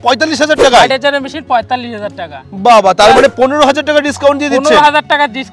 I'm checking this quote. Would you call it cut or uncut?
uncut